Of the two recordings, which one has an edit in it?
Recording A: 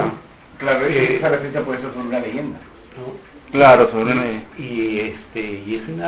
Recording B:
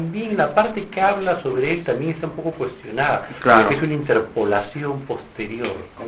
B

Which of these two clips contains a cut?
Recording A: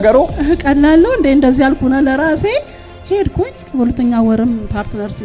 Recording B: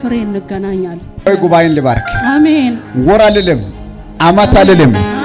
B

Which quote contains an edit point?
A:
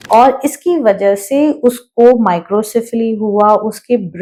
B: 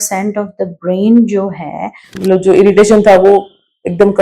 B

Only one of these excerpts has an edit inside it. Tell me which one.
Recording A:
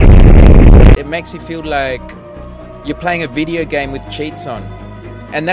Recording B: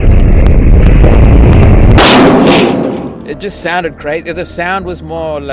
A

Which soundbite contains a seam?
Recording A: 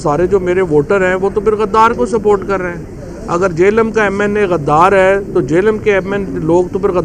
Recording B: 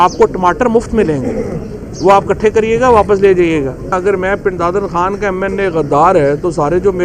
B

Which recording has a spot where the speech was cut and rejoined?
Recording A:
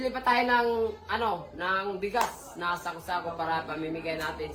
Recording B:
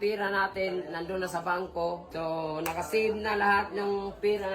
B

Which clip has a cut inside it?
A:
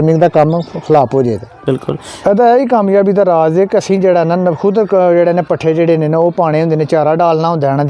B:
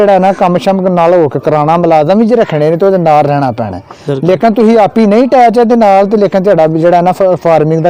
A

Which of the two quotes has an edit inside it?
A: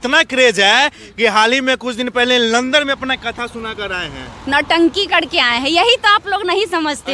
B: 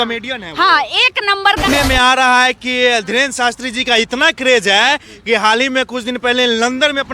B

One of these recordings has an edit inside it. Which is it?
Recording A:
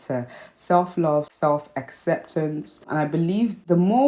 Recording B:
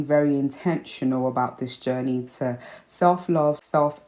A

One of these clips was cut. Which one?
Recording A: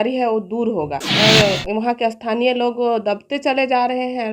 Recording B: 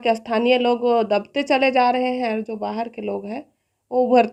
A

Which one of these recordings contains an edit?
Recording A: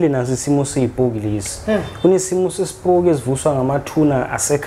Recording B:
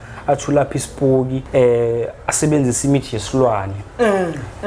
B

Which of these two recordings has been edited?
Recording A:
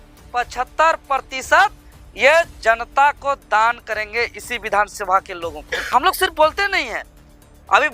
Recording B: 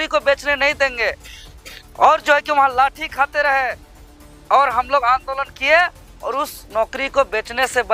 A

